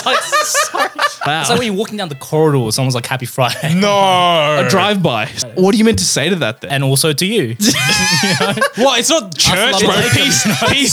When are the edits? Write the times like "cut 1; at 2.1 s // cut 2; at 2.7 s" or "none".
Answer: cut 1; at 1.2 s // cut 2; at 5.4 s // cut 3; at 6.6 s